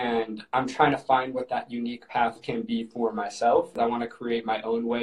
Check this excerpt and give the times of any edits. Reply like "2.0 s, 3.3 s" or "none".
3.8 s